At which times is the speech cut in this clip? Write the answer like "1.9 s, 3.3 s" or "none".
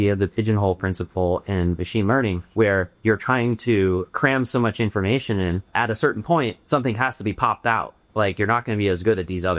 2.7 s, 4.1 s, 5.7 s, 6.6 s